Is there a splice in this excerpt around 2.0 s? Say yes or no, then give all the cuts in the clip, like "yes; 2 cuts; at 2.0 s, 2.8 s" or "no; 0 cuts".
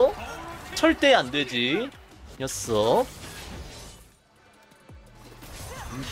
no; 1 cut; at 4.2 s